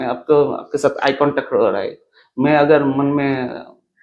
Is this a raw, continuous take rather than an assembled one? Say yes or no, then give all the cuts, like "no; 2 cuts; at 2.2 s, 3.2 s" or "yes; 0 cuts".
yes; 0 cuts